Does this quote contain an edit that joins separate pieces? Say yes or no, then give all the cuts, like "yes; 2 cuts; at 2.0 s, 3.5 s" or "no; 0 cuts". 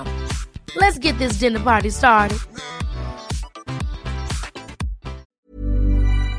yes; 1 cut; at 5.3 s